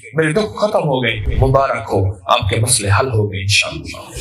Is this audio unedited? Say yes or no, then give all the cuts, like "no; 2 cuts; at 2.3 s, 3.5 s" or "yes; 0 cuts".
no; 1 cut; at 1.2 s